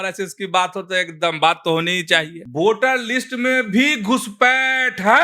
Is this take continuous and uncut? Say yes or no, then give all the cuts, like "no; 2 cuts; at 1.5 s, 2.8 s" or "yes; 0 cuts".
no; 1 cut; at 2.4 s